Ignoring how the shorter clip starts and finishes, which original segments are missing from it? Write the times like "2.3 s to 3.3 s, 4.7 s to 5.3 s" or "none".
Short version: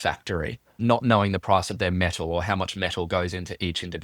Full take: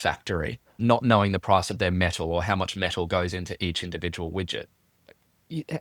none